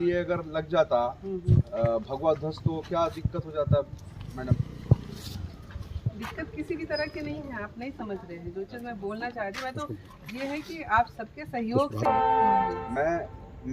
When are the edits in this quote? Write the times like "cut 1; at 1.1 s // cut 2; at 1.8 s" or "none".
cut 1; at 12.1 s